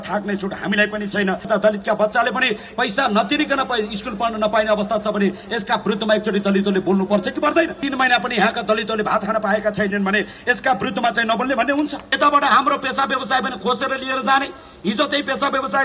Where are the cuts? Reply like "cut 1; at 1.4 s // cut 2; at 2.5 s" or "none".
cut 1; at 1.5 s // cut 2; at 7.8 s // cut 3; at 12.0 s